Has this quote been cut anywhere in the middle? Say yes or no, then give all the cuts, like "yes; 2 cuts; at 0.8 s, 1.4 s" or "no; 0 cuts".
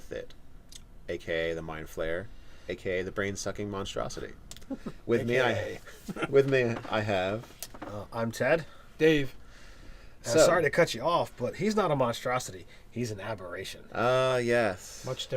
yes; 1 cut; at 1.1 s